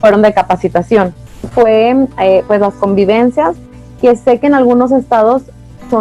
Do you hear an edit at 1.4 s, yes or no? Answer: yes